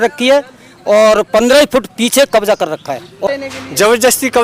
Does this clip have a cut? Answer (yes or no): yes